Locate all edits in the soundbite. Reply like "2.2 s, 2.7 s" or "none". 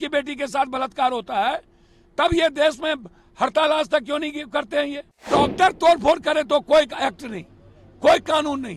5.3 s